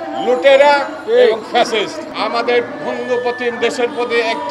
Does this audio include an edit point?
yes; 1 cut; at 2.0 s

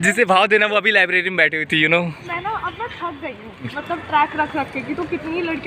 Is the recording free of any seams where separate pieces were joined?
no; 2 cuts; at 2.2 s, 3.8 s

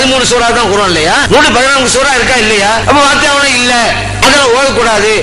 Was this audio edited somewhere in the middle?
yes; 2 cuts; at 1.2 s, 2.8 s

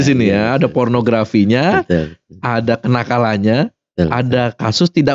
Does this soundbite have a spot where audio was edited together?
no; 0 cuts

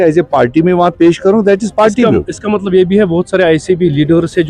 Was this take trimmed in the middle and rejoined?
no; 0 cuts

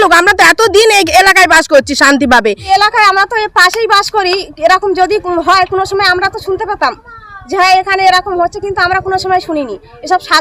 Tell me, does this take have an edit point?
yes; 1 cut; at 2.7 s

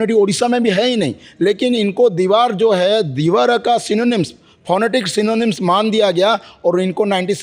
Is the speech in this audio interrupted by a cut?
no; 0 cuts

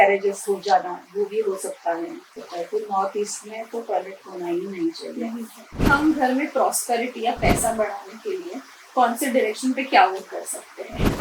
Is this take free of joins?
no; 2 cuts; at 2.3 s, 5.8 s

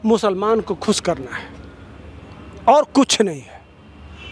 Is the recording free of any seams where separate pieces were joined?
yes; 0 cuts

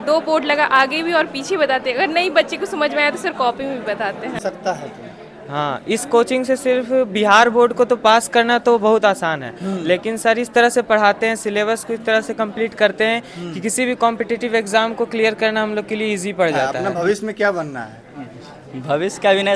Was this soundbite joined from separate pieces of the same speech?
yes; 2 cuts; at 4.4 s, 16.7 s

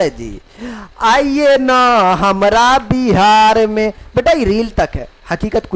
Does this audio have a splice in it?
no; 0 cuts

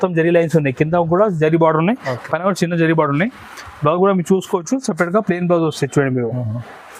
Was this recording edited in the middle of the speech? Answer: no; 0 cuts

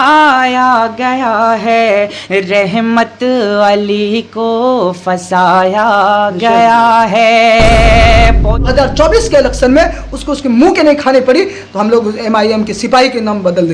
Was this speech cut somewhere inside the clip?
yes; 1 cut; at 8.7 s

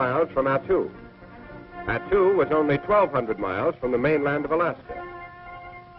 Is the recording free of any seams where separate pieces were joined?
yes; 0 cuts

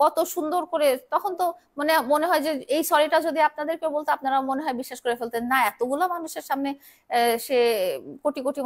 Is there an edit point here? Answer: no; 0 cuts

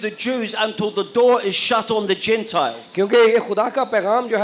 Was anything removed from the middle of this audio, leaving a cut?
no; 0 cuts

